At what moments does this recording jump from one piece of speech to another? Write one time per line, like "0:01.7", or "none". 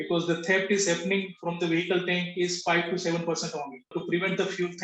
0:03.9